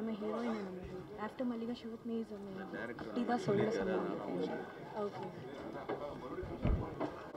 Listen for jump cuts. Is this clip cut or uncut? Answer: uncut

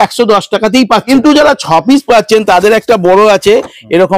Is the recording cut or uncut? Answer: cut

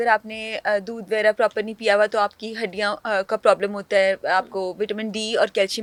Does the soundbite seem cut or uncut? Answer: uncut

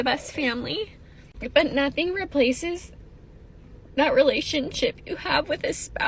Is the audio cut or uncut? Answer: uncut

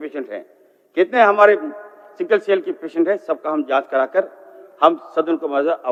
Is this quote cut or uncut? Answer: uncut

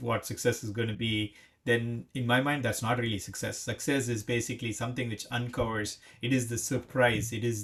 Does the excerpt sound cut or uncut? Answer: uncut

